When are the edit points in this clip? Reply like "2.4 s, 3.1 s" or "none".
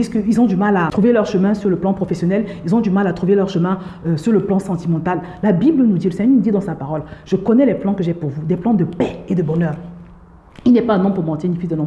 0.9 s